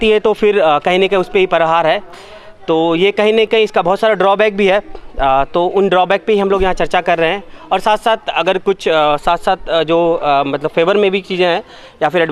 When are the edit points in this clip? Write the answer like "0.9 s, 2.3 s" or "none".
none